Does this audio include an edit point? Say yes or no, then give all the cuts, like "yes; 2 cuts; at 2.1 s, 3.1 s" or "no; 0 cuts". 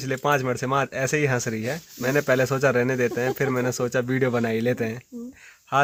no; 0 cuts